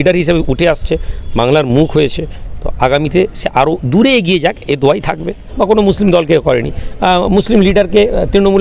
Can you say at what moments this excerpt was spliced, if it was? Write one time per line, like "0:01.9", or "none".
0:05.4